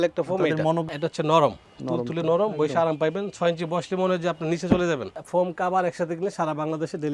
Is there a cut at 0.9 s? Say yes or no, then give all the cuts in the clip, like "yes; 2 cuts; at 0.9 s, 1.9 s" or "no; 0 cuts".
yes; 2 cuts; at 0.9 s, 5.2 s